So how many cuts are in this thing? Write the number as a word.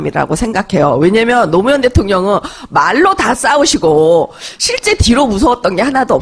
one